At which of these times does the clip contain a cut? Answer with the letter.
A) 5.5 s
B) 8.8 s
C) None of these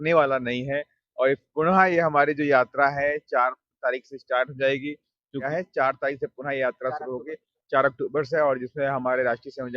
A